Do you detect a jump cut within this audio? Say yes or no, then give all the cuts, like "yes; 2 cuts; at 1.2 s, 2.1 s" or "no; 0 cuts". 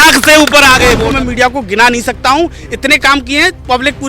yes; 1 cut; at 1.0 s